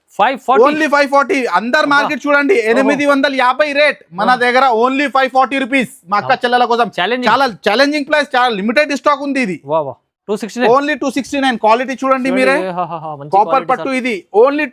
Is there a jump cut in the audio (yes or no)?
yes